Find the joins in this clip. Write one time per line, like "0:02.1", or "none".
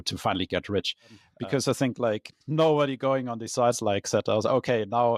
0:01.2